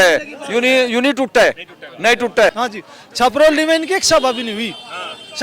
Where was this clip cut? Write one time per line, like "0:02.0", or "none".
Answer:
0:02.5